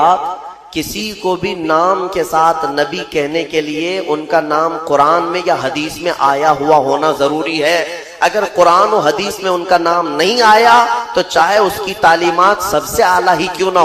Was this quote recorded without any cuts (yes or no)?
yes